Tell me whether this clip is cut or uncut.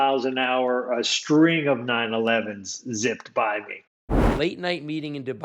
cut